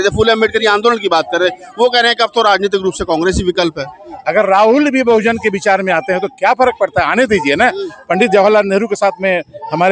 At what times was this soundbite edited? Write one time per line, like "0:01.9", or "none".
0:04.1